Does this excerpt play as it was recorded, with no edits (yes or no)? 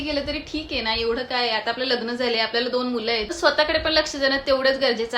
no